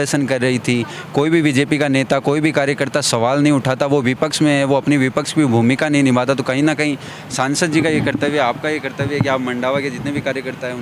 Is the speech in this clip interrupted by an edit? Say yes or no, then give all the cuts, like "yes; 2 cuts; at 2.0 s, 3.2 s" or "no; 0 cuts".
no; 0 cuts